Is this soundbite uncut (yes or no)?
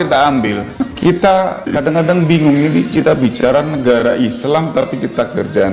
no